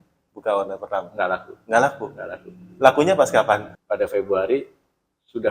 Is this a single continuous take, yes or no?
no